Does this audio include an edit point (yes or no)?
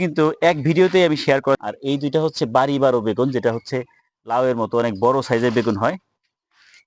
yes